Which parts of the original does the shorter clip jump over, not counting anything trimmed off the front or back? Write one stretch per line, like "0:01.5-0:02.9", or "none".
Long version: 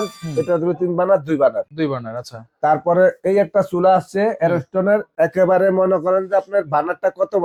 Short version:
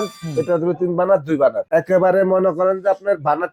0:01.6-0:05.1